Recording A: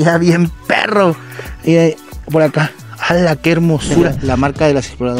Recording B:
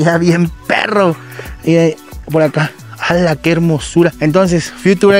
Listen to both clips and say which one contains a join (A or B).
A